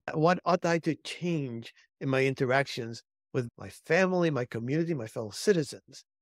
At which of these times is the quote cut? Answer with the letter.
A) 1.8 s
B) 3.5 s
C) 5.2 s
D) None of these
B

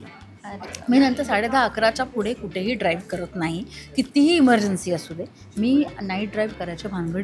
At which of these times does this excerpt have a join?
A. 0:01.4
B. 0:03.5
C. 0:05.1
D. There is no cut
D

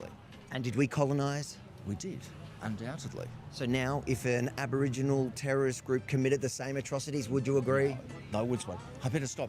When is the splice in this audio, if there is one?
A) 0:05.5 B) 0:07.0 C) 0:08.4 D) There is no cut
D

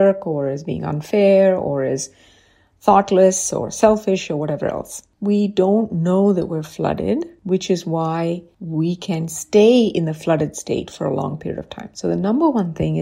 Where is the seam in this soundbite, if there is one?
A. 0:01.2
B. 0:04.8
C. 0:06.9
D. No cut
D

